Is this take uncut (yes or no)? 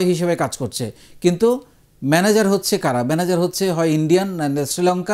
yes